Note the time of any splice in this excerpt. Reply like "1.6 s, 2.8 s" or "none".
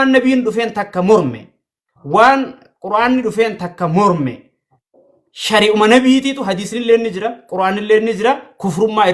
none